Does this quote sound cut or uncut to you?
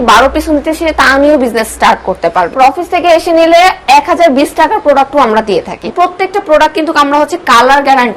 cut